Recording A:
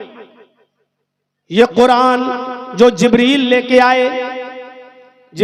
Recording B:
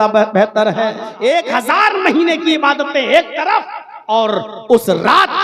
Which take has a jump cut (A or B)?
B